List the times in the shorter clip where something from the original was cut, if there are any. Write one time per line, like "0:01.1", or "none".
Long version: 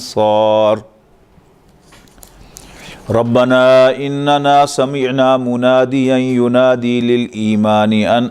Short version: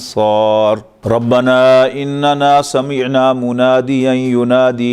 0:00.9